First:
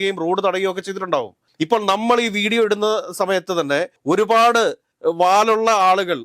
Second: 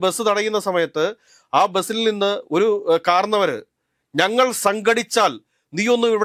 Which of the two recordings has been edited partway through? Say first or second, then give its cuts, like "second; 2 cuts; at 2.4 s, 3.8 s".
first; 3 cuts; at 1.4 s, 3.9 s, 4.9 s